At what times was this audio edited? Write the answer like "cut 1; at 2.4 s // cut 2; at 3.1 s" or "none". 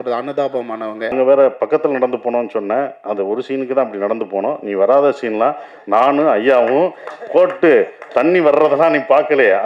cut 1; at 1.1 s